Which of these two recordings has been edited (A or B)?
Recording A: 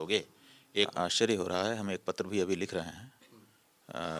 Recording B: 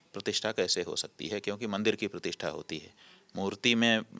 A